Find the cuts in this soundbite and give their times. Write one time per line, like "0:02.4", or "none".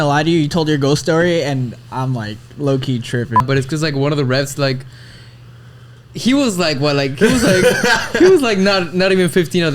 0:03.4